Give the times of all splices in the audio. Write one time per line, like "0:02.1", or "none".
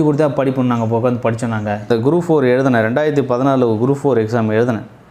0:01.9